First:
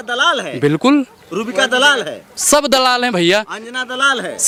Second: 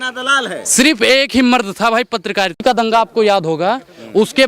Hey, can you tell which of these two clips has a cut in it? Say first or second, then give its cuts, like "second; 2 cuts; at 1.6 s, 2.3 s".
second; 1 cut; at 2.6 s